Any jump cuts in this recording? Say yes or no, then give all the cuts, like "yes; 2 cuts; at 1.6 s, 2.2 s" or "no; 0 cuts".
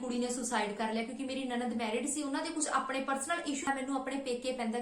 yes; 1 cut; at 3.6 s